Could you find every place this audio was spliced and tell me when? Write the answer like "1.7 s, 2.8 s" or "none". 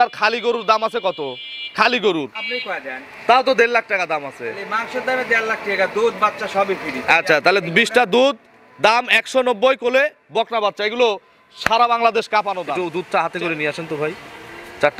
12.8 s